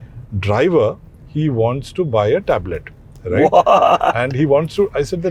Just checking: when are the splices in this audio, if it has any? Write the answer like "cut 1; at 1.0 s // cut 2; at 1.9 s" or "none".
none